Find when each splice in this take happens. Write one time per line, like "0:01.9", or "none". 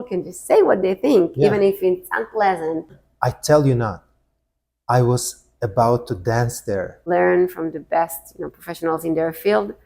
0:03.0
0:07.0